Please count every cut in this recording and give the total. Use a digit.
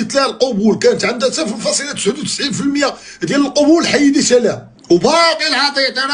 1